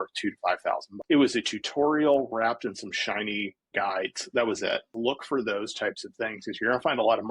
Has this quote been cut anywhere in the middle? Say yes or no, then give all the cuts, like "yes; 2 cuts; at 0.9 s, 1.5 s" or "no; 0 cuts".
yes; 3 cuts; at 0.9 s, 3.6 s, 4.9 s